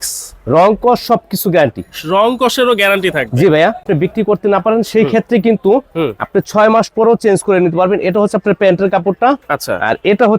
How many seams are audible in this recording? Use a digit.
1